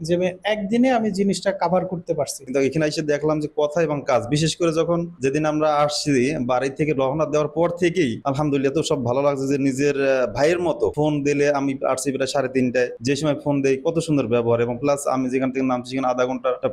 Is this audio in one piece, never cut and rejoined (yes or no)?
no